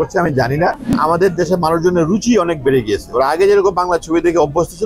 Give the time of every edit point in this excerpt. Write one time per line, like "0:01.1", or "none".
0:00.9